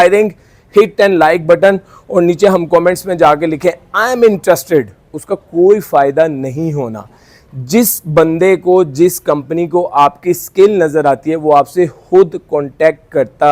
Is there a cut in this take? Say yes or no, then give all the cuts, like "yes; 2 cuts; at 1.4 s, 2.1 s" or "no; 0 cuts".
no; 0 cuts